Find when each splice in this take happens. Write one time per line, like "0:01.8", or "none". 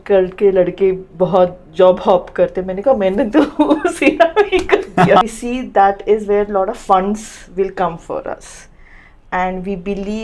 0:05.2